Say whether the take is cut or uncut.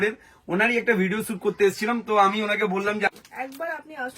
cut